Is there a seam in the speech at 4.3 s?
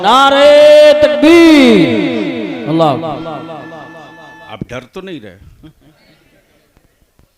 yes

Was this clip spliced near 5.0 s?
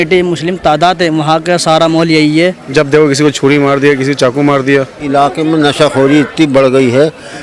yes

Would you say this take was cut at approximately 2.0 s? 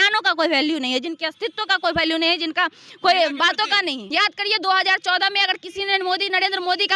no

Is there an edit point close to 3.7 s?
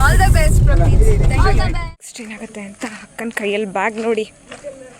no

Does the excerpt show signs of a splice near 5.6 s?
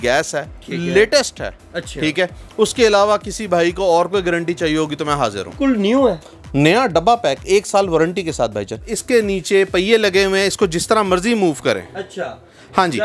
yes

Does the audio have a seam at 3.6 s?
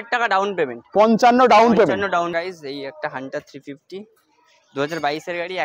no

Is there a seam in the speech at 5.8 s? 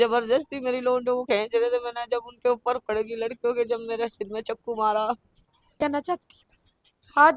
yes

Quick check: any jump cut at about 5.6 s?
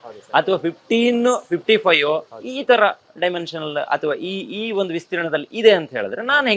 no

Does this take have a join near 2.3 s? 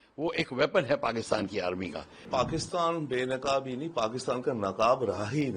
yes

